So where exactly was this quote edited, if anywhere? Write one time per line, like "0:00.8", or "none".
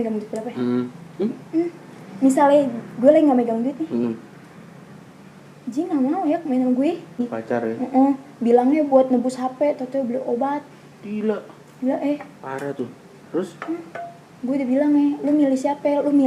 0:07.2